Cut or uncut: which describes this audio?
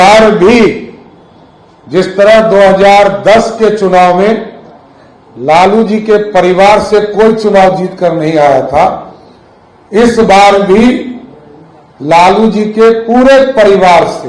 uncut